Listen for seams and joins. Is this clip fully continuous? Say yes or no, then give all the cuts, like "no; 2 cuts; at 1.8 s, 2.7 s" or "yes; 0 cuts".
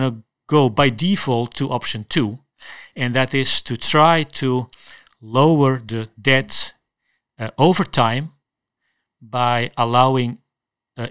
yes; 0 cuts